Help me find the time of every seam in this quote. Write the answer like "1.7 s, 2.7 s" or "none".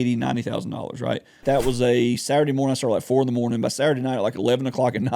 1.4 s